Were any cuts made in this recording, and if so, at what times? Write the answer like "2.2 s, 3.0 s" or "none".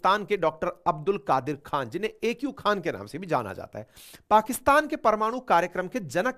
none